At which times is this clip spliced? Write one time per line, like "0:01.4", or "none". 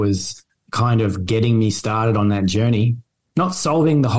none